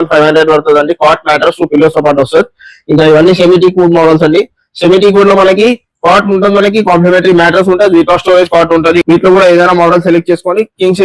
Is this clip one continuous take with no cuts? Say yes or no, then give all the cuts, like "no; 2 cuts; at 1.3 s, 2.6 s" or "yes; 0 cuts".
yes; 0 cuts